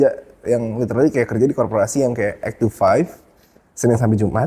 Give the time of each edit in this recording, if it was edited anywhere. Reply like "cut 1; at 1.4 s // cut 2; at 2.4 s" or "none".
none